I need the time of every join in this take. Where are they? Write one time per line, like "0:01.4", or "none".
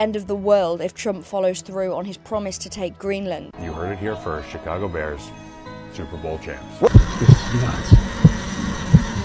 0:03.4
0:06.9